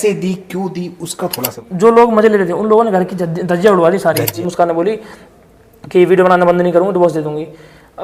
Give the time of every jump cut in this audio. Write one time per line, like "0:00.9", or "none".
0:01.6
0:04.4